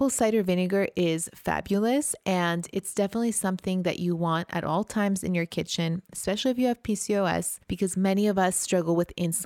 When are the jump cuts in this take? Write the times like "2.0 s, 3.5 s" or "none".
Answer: 7.6 s